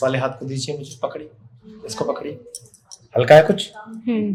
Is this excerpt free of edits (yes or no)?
yes